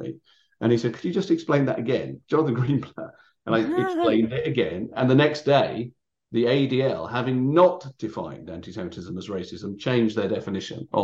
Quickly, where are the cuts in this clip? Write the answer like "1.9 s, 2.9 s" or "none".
none